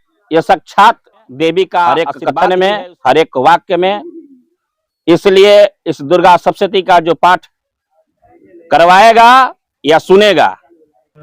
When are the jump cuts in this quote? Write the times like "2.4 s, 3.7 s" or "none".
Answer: 1.9 s